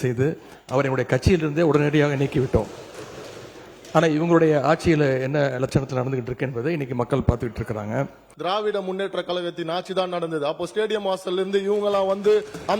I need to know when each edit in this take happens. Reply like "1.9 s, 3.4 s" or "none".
8.2 s